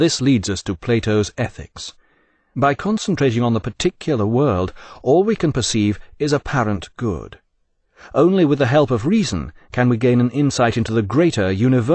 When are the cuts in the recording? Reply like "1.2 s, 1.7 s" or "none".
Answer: 4.6 s